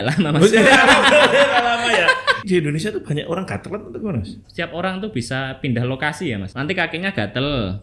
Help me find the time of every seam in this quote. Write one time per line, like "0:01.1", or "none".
0:02.4
0:04.4
0:06.5

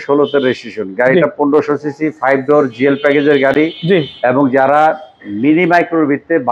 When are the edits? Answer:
none

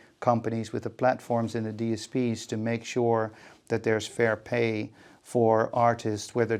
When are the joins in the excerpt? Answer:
none

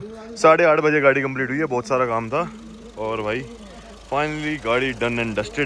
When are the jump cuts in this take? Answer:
none

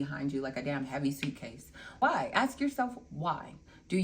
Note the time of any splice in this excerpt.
none

